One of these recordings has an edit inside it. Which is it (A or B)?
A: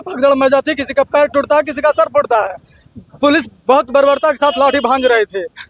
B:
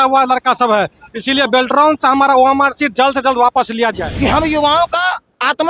B